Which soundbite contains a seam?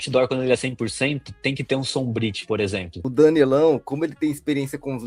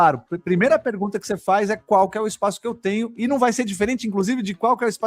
first; 1 cut; at 2.9 s

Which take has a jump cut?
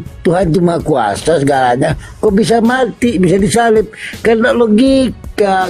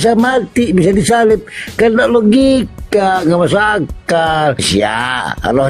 second; 1 cut; at 4.7 s

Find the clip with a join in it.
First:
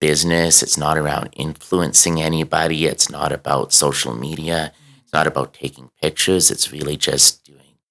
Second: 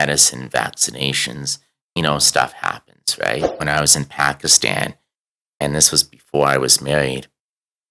second; 1 cut; at 3.5 s

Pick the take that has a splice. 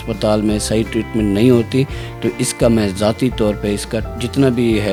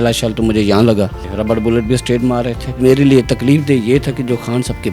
second; 2 cuts; at 1.2 s, 2.8 s

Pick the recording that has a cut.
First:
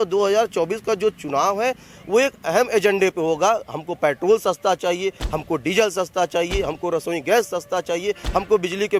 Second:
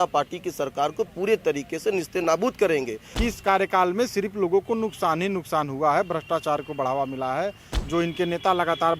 second; 1 cut; at 3.0 s

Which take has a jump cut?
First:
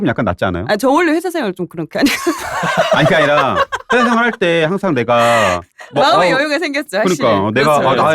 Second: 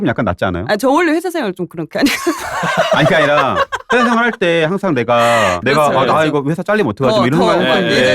second; 1 cut; at 5.6 s

